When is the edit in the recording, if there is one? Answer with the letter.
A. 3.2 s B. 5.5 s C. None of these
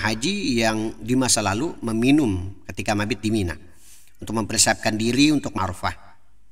B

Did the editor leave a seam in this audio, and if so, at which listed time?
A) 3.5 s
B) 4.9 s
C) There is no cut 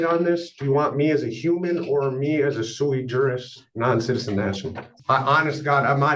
B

